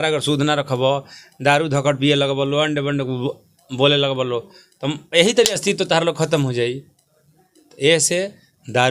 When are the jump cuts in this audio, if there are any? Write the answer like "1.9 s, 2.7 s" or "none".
none